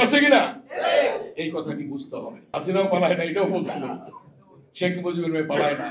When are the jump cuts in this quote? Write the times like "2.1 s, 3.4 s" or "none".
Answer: 2.4 s